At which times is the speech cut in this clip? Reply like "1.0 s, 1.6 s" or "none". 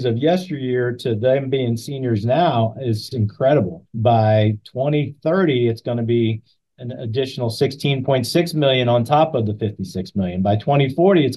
3.1 s, 3.8 s